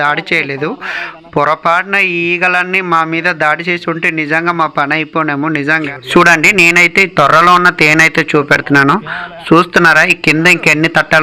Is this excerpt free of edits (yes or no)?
no